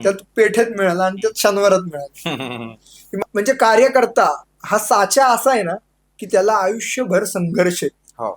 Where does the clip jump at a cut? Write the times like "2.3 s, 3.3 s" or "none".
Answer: 3.0 s